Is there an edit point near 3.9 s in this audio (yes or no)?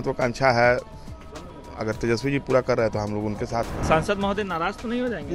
yes